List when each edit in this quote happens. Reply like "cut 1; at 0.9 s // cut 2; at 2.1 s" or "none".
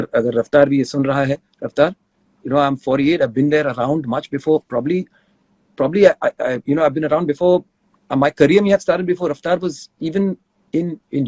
none